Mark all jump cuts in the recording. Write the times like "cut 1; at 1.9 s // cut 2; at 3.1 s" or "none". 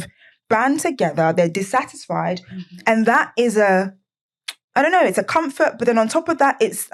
none